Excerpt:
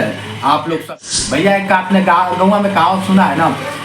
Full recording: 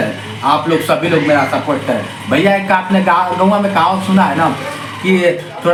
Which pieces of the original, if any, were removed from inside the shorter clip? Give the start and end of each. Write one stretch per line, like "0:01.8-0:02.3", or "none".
0:00.9-0:01.9